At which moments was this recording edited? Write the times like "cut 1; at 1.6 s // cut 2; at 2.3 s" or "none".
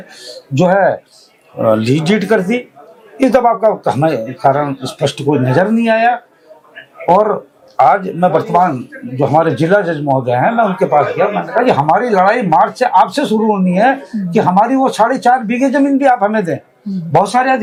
none

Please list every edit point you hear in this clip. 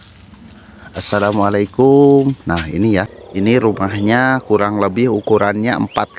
cut 1; at 3.2 s

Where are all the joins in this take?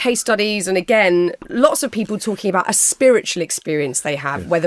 cut 1; at 1.5 s

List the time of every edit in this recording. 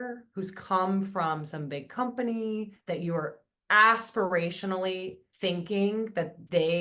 cut 1; at 2.8 s // cut 2; at 5.2 s

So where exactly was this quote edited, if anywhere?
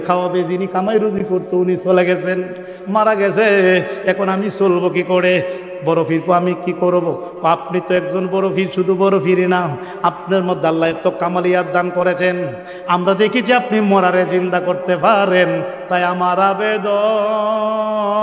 none

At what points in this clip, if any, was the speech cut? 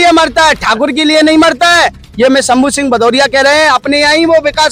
none

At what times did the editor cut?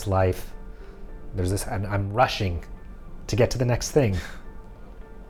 none

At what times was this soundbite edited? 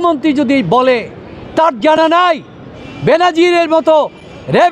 none

